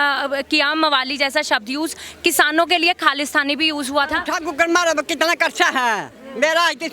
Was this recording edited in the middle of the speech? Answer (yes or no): yes